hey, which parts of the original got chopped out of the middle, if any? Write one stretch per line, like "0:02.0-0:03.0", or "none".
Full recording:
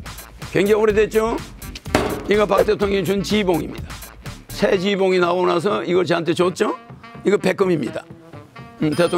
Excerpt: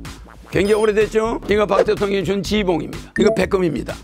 0:01.4-0:02.2
0:03.8-0:07.1